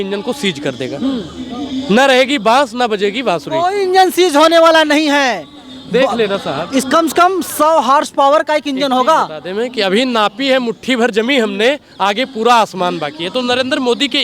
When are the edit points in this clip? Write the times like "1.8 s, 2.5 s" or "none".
none